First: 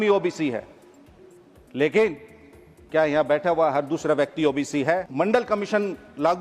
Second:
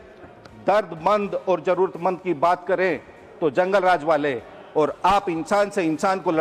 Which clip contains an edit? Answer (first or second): first